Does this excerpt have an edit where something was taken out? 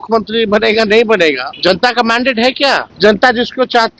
yes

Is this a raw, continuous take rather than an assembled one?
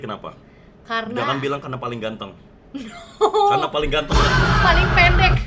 yes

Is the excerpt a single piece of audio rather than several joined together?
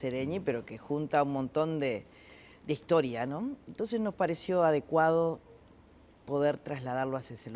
no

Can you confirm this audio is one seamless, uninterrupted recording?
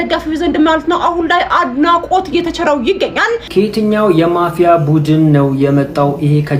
no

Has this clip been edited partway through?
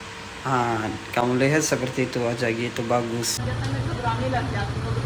yes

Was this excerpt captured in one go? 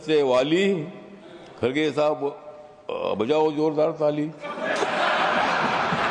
yes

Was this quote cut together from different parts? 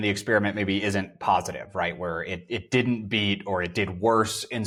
no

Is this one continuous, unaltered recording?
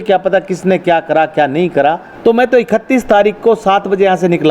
no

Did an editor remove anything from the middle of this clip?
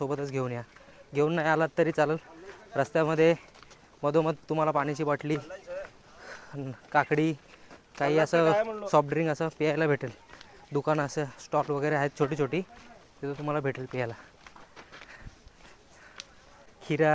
no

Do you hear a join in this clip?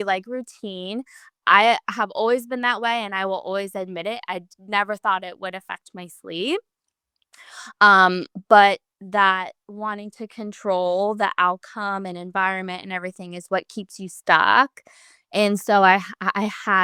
no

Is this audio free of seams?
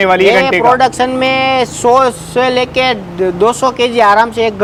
yes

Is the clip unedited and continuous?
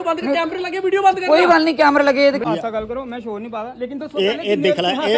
no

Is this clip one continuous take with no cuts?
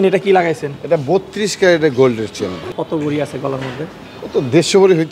no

